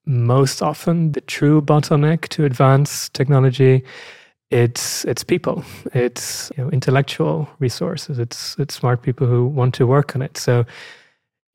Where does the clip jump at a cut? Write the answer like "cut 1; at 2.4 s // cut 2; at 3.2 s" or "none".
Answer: cut 1; at 1.1 s // cut 2; at 6.5 s